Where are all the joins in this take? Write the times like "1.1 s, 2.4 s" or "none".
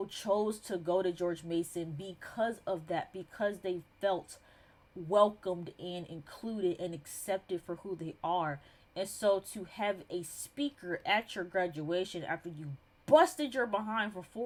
none